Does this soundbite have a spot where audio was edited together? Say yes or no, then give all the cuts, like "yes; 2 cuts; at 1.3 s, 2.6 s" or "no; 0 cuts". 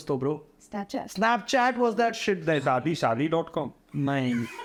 no; 0 cuts